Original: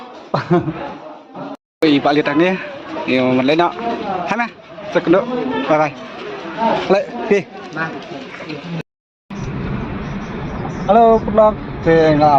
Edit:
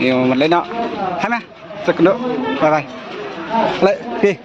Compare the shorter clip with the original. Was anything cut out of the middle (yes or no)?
no